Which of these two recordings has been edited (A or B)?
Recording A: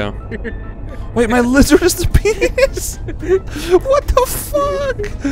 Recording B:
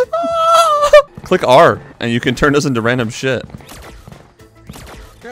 B